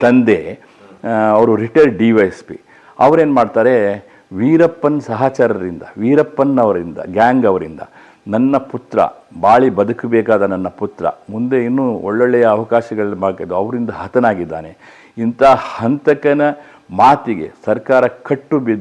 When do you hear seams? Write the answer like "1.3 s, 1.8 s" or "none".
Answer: none